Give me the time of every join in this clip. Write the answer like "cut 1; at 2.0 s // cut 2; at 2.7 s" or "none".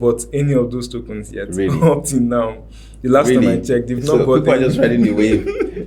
none